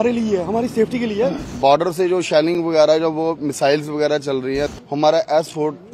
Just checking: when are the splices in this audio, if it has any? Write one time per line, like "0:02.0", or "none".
0:01.6
0:04.7